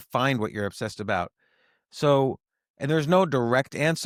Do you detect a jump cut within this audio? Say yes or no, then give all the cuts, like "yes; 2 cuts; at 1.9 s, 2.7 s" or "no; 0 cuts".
no; 0 cuts